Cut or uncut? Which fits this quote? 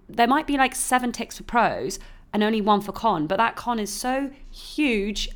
uncut